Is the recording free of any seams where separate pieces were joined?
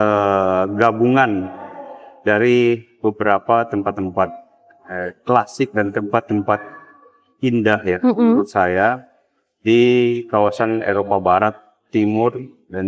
yes; 0 cuts

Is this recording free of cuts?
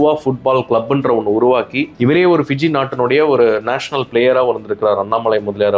yes; 0 cuts

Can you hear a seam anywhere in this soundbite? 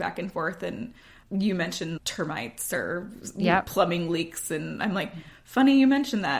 yes; 2 cuts; at 1.1 s, 2.0 s

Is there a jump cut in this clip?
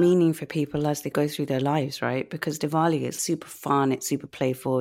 yes; 2 cuts; at 1.1 s, 3.2 s

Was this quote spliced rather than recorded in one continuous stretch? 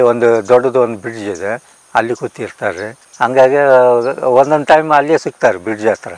yes; 1 cut; at 3.0 s

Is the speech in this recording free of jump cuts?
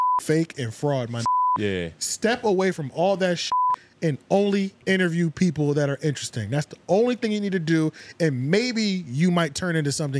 yes; 0 cuts

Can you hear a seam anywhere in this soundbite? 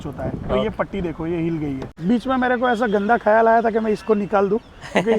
yes; 1 cut; at 1.9 s

